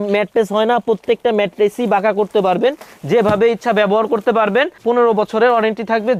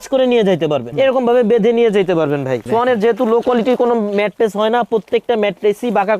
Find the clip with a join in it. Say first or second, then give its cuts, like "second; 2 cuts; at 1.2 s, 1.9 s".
second; 2 cuts; at 0.9 s, 2.6 s